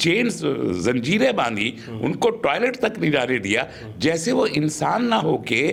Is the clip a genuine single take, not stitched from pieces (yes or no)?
yes